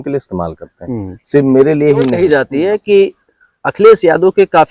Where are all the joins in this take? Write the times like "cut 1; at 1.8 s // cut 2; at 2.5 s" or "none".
cut 1; at 2.2 s